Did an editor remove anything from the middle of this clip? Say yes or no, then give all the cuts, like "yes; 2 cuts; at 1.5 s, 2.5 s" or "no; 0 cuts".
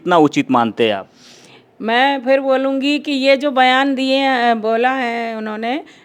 no; 0 cuts